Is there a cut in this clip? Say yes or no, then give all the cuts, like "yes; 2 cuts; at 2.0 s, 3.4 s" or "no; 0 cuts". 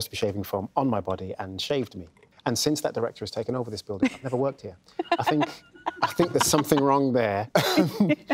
yes; 1 cut; at 7.4 s